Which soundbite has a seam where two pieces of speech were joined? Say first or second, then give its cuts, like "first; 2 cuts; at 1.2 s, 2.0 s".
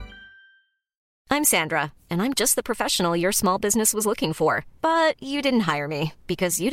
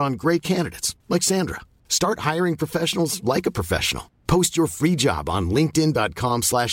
first; 1 cut; at 1.1 s